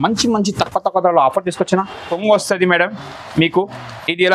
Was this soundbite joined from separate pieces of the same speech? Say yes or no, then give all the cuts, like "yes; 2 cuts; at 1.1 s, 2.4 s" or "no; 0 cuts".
yes; 1 cut; at 2.1 s